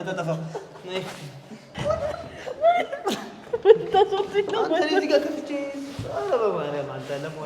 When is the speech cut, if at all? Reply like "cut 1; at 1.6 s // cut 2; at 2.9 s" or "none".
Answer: cut 1; at 1.7 s